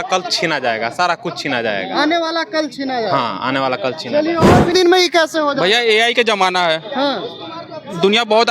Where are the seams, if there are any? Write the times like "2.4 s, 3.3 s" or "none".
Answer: 4.7 s